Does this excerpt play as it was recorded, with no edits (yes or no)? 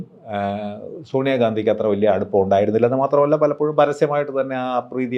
yes